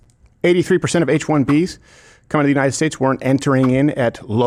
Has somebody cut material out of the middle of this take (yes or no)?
no